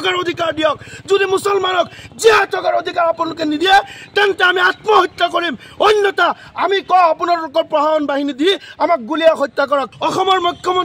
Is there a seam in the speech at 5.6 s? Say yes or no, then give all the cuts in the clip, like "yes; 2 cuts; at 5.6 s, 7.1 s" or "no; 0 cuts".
no; 1 cut; at 9.9 s